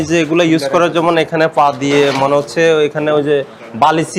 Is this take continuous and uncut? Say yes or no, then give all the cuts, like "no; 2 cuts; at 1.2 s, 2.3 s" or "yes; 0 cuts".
yes; 0 cuts